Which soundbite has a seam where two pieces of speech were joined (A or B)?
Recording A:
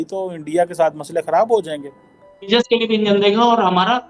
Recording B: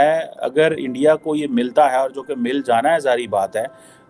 A